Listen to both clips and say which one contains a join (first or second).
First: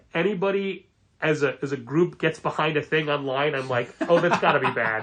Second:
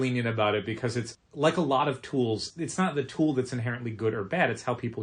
second